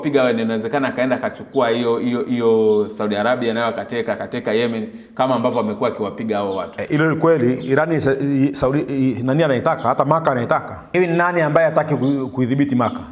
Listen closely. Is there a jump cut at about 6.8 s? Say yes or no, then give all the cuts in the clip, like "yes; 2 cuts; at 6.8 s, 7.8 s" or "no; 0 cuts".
yes; 2 cuts; at 6.8 s, 10.8 s